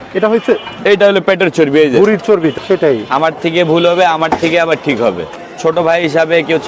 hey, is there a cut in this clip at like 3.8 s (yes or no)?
no